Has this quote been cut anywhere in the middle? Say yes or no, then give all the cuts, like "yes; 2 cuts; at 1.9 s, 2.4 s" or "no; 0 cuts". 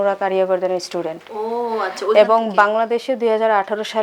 no; 0 cuts